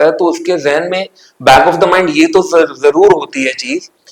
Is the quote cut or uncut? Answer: uncut